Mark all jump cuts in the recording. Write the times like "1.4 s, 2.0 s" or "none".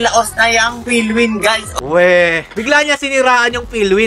1.7 s, 2.5 s

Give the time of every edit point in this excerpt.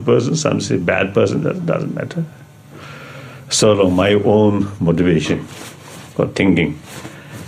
none

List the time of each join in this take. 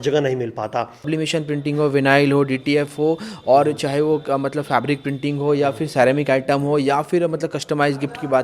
1.1 s

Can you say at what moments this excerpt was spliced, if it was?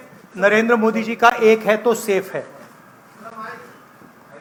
none

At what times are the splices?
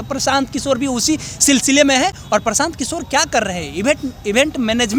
none

